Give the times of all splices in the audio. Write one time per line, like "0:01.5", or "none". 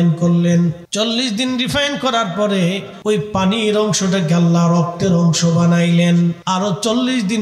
0:00.8
0:02.9
0:06.4